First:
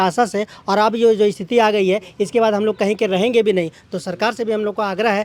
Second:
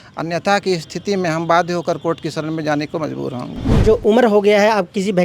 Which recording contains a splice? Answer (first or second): second